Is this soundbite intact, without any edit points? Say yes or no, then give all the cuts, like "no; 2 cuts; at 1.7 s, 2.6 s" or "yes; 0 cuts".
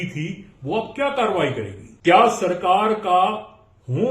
no; 1 cut; at 1.8 s